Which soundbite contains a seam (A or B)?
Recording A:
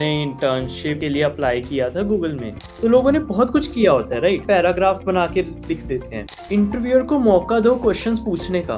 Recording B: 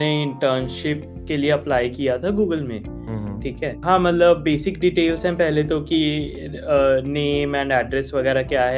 A